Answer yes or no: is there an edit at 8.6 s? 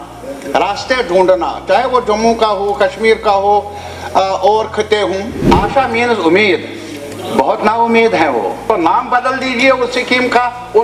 yes